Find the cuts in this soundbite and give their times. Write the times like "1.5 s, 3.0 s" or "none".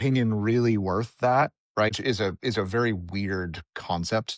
1.9 s